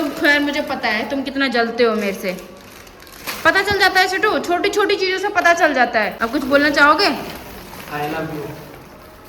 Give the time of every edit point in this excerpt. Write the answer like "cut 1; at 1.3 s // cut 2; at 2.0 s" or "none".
cut 1; at 6.2 s